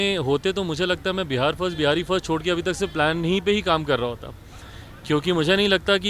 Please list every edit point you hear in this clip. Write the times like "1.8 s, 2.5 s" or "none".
none

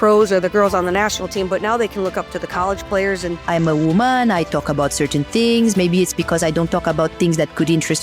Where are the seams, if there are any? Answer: 3.4 s

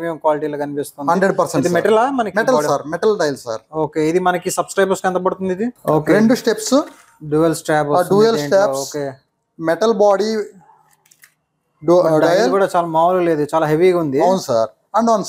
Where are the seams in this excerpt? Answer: 5.8 s

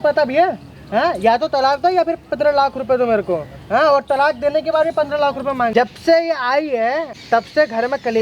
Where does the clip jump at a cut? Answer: 5.7 s, 7.1 s

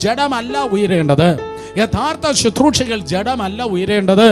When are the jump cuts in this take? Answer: none

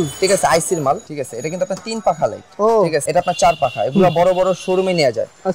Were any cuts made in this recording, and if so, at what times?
1.1 s, 3.1 s

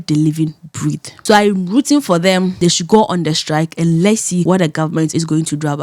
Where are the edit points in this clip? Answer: 1.1 s, 2.5 s, 4.4 s, 5.1 s

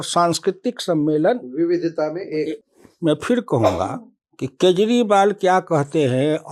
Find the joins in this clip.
2.6 s

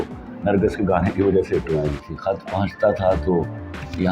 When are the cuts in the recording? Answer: 2.1 s

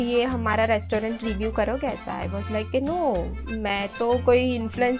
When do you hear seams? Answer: none

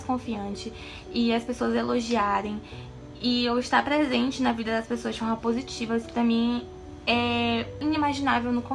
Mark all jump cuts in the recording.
7.8 s

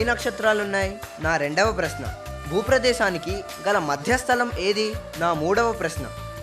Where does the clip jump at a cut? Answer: 1.1 s, 5.0 s

